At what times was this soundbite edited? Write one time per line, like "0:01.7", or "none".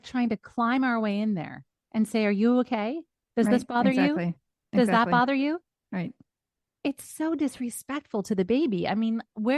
none